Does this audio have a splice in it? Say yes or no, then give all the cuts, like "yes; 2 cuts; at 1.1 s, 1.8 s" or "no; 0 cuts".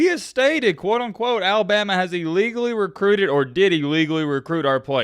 no; 0 cuts